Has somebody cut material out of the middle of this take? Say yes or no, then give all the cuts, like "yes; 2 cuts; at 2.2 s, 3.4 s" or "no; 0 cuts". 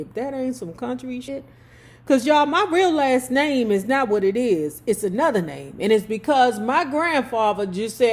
yes; 1 cut; at 1.3 s